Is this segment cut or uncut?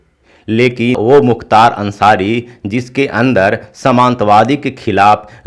cut